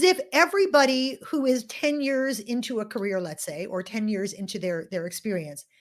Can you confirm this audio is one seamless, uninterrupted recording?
yes; 0 cuts

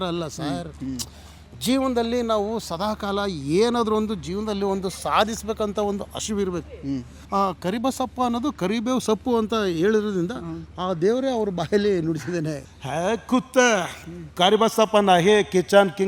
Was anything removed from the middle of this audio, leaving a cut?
yes; 2 cuts; at 7.2 s, 12.7 s

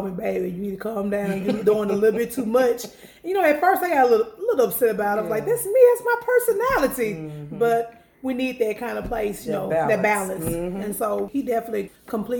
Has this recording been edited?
yes; 1 cut; at 11.5 s

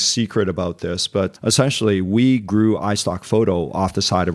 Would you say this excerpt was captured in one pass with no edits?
no; 1 cut; at 1.4 s

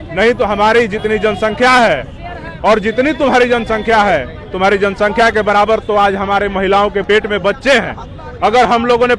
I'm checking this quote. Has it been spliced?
yes; 1 cut; at 7.0 s

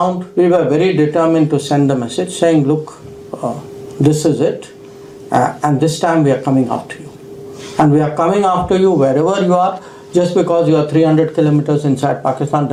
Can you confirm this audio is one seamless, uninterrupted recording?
yes; 0 cuts

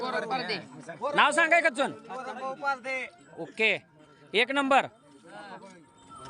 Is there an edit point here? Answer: no; 0 cuts

